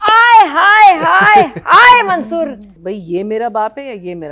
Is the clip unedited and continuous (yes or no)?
no